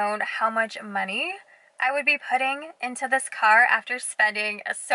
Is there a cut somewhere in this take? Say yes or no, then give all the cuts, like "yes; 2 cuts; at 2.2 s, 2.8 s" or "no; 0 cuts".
no; 0 cuts